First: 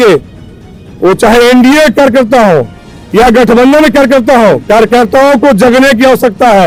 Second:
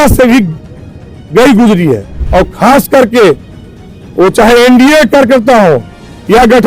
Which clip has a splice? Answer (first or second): second